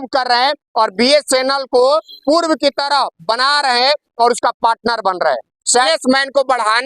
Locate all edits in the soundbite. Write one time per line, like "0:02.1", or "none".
0:05.9